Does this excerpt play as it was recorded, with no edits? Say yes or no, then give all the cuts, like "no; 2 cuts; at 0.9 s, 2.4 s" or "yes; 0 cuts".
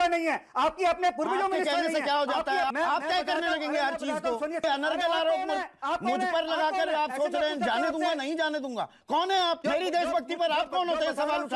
no; 3 cuts; at 2.7 s, 4.6 s, 9.6 s